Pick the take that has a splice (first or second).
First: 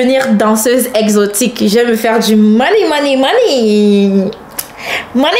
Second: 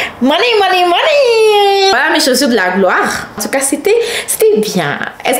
second